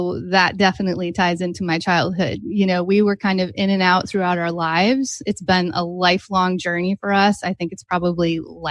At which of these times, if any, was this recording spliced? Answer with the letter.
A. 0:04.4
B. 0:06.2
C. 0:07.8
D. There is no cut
D